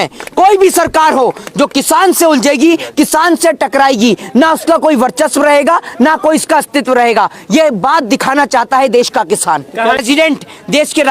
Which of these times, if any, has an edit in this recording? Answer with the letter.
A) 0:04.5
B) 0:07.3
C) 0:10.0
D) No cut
C